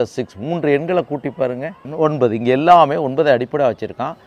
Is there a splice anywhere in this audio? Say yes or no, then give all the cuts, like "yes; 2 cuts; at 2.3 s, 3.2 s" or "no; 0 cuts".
yes; 1 cut; at 1.8 s